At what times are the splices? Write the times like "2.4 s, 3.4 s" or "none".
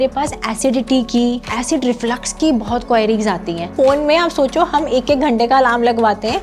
1.5 s, 3.7 s